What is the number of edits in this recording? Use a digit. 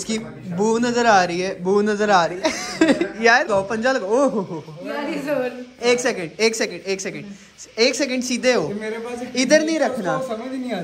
1